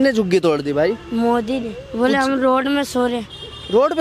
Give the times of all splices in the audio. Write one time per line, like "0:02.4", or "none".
0:01.8